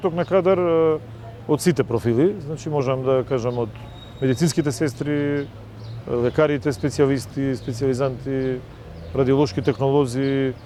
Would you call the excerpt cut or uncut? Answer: uncut